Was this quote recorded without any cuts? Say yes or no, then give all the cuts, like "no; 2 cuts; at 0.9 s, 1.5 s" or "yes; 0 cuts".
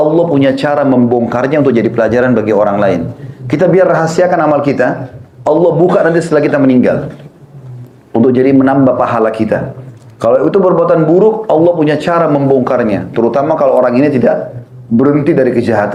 yes; 0 cuts